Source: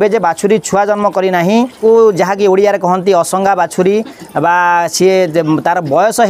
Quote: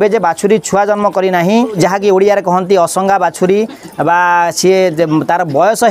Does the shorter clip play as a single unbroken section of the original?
no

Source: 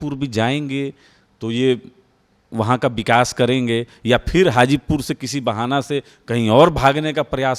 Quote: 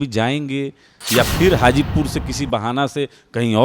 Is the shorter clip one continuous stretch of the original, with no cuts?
no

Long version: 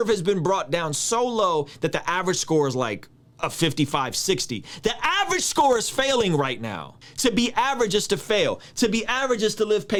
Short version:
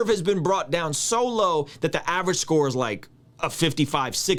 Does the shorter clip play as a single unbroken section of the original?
yes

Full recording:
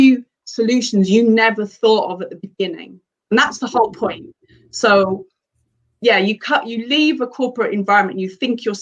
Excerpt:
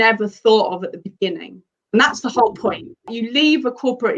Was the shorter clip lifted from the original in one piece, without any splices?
no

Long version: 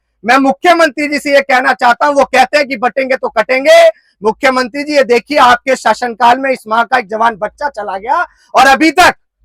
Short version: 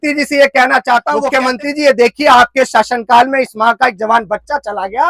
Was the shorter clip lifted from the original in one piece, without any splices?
no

